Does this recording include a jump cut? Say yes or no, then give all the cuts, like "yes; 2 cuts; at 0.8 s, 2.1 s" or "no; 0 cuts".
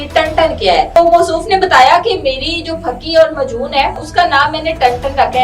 yes; 2 cuts; at 1.0 s, 4.0 s